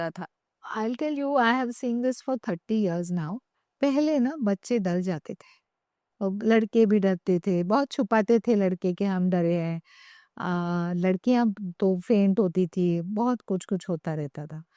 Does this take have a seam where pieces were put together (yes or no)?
no